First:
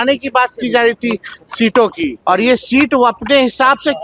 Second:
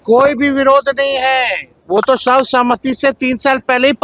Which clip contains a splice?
first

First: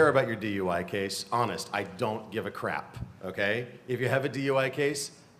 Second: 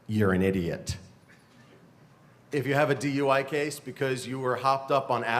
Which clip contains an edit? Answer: first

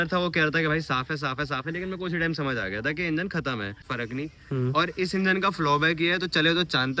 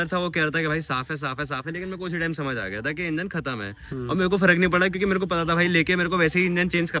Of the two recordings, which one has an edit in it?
first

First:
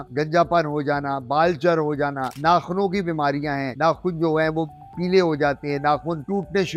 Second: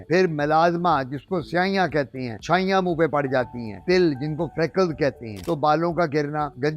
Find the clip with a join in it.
second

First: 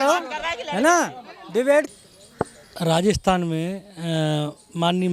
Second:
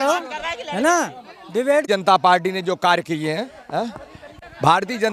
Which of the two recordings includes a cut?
first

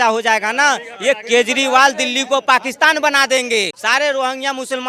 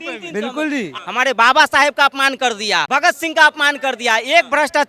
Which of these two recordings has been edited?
second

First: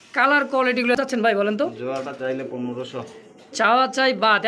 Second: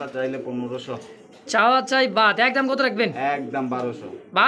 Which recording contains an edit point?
first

